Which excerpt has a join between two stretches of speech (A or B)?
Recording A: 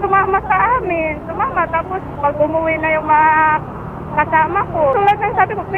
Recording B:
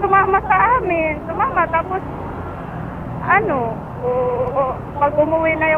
A